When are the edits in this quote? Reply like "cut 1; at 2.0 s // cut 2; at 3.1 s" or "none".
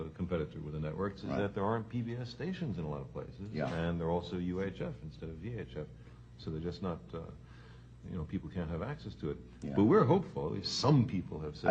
cut 1; at 6.4 s

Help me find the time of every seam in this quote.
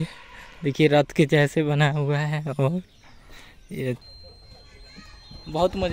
cut 1; at 4.0 s

